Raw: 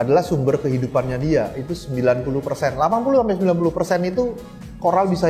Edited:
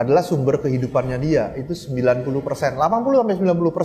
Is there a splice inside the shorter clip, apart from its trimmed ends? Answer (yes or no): no